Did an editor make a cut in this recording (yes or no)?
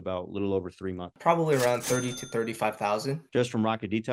yes